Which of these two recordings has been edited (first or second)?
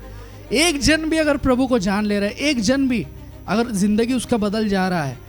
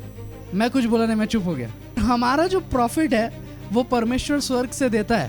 second